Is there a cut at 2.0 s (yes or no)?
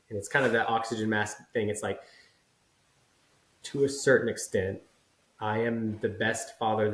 no